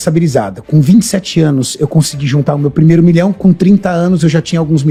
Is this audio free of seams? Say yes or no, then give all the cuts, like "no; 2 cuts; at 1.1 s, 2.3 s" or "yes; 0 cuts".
yes; 0 cuts